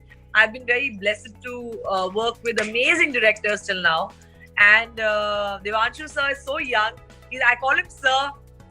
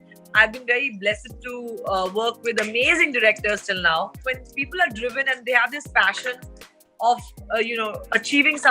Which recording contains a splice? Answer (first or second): second